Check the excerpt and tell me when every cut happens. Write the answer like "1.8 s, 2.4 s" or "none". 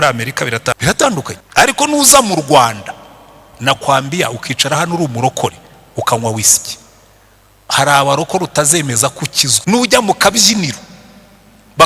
0.8 s, 9.4 s